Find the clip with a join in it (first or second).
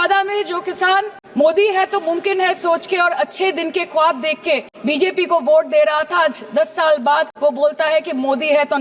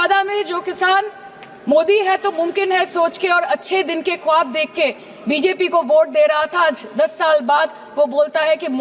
first